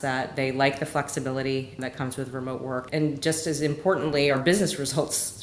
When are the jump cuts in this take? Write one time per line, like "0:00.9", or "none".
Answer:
0:01.8
0:02.9
0:04.4